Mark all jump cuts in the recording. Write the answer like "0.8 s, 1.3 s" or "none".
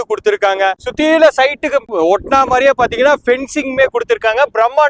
1.9 s